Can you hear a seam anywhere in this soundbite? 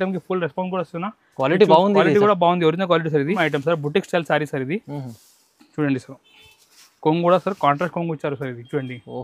yes; 1 cut; at 3.4 s

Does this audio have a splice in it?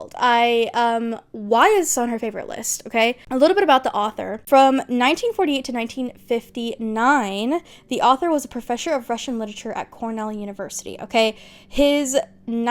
no; 0 cuts

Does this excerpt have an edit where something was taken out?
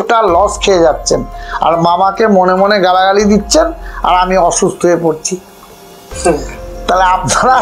no; 0 cuts

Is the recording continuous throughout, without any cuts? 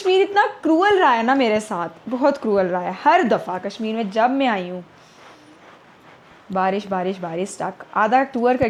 yes; 0 cuts

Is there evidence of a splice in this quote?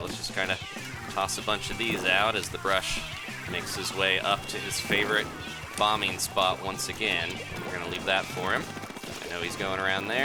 no; 0 cuts

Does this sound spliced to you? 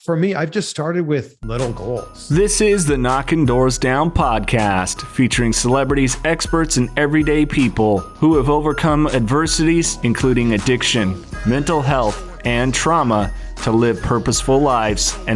yes; 1 cut; at 2.1 s

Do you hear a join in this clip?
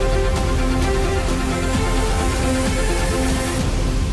no; 0 cuts

